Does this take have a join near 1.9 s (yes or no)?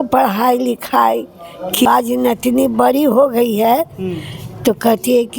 yes